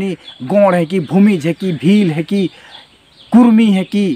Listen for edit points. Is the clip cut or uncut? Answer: uncut